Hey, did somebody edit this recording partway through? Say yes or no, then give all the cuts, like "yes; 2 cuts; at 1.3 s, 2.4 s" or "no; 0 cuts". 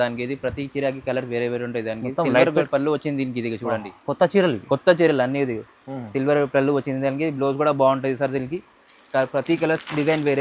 no; 0 cuts